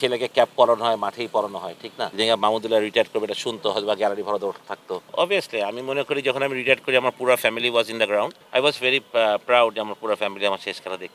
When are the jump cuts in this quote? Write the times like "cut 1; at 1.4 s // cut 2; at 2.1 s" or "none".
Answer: cut 1; at 2.0 s // cut 2; at 5.0 s // cut 3; at 8.4 s